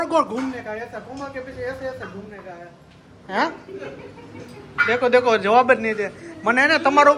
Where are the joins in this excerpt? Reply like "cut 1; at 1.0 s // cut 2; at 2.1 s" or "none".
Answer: none